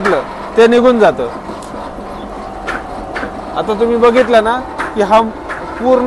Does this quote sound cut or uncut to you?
uncut